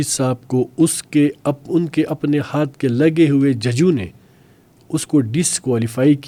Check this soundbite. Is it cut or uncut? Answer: uncut